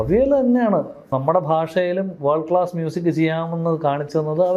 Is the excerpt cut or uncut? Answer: cut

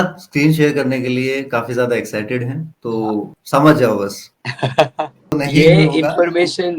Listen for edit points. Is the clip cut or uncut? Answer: cut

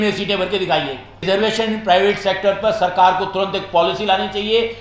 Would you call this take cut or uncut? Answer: cut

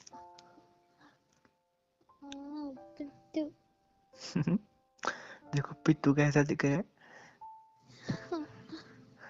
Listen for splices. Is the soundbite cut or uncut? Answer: uncut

